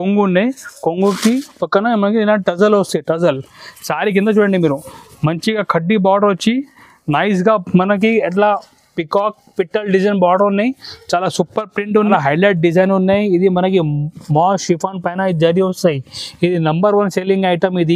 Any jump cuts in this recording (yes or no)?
yes